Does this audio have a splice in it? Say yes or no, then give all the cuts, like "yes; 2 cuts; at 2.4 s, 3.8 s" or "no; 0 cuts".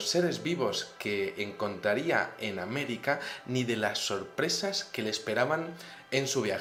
no; 0 cuts